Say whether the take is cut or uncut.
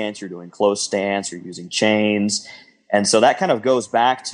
uncut